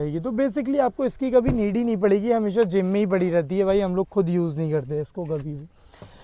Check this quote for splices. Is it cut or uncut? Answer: uncut